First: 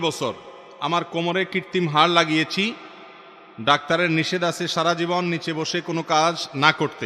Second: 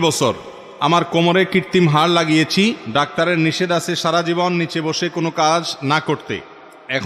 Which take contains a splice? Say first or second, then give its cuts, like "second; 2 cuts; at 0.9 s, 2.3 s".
second; 1 cut; at 2.8 s